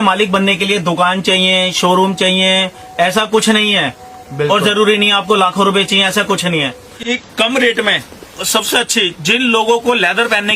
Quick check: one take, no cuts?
no; 1 cut; at 6.9 s

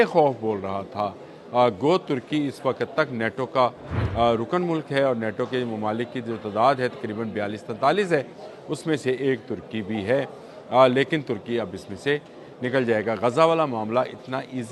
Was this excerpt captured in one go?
yes; 0 cuts

